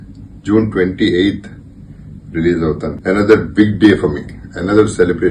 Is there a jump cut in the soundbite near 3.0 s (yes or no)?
yes